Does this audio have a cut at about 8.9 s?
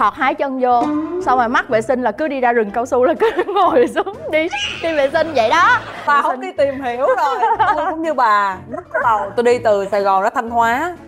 no; 1 cut; at 6.0 s

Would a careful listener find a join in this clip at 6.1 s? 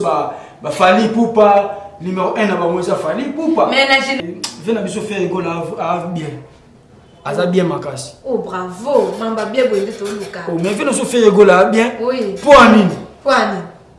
no; 1 cut; at 4.2 s

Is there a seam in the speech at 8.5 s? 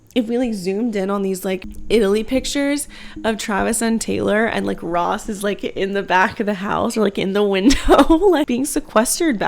yes; 2 cuts; at 1.7 s, 8.5 s

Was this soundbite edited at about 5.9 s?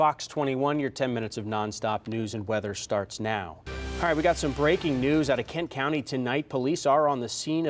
no; 1 cut; at 3.7 s

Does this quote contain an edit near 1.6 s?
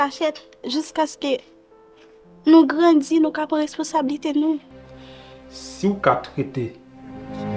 no; 1 cut; at 4.8 s

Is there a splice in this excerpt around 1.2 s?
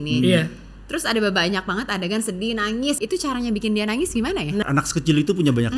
no; 2 cuts; at 3.0 s, 4.6 s

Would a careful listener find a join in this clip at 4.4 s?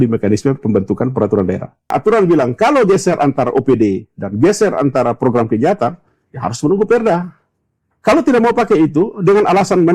no; 2 cuts; at 1.9 s, 7.8 s

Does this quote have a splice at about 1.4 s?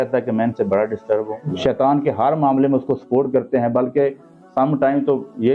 yes; 1 cut; at 1.4 s

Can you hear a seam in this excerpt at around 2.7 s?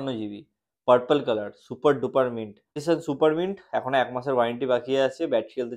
yes; 1 cut; at 2.7 s

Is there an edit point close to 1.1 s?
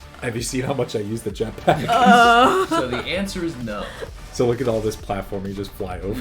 no; 1 cut; at 4.0 s

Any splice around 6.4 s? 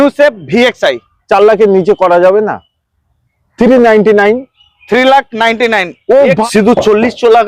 yes; 1 cut; at 6.4 s

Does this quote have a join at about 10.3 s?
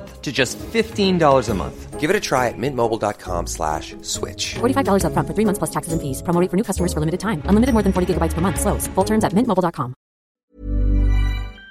yes; 1 cut; at 10.3 s

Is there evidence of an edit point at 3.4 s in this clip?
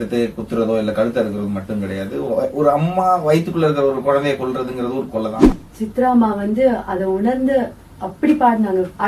no; 1 cut; at 5.4 s

